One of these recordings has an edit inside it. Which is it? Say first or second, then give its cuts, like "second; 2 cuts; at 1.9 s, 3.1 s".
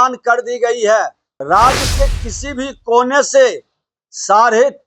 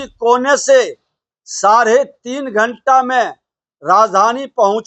first; 1 cut; at 1.3 s